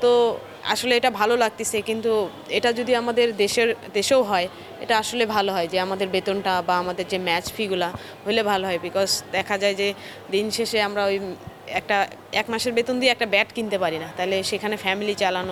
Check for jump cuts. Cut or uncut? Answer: uncut